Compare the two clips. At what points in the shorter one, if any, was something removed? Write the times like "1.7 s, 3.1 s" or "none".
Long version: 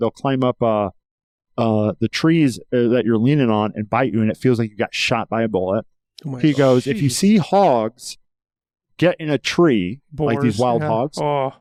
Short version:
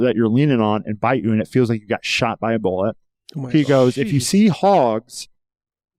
none